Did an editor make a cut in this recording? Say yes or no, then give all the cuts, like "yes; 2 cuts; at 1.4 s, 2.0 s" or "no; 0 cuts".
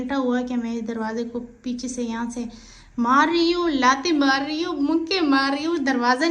no; 0 cuts